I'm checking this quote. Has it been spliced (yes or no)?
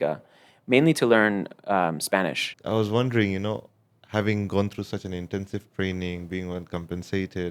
yes